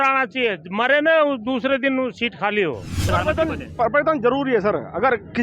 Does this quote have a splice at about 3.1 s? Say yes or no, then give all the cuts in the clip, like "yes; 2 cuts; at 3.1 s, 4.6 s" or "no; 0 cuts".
yes; 1 cut; at 3.1 s